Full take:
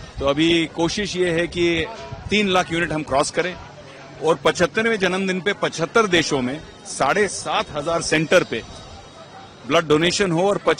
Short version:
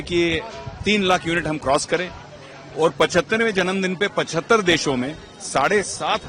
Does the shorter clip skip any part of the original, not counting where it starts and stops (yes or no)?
no